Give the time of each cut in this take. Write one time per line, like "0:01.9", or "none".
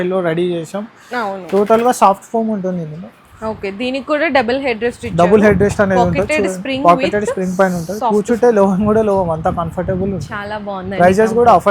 none